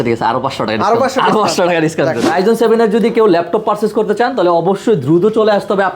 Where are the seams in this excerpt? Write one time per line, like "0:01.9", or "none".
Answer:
0:02.2